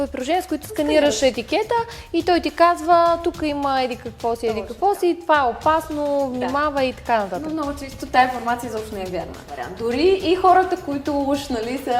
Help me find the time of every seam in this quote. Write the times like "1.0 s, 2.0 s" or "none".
9.7 s